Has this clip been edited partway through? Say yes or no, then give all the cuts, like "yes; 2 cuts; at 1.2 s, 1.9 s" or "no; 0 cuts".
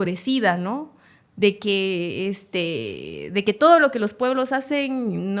no; 0 cuts